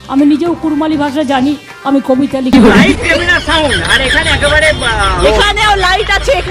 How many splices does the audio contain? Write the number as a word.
one